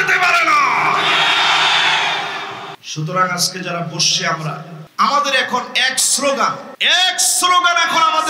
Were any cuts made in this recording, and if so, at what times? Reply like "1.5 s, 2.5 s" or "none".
2.8 s, 4.8 s, 6.7 s